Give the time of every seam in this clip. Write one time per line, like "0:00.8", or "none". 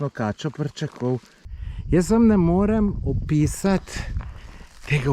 0:01.3